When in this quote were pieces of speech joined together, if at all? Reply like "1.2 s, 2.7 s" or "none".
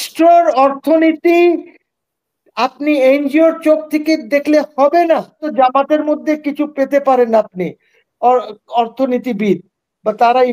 5.5 s